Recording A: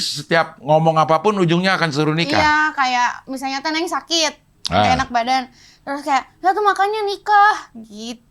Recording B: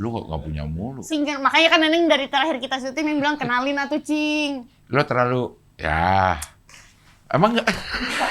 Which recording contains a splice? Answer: B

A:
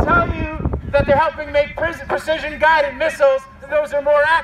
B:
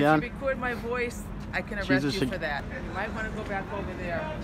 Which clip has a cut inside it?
B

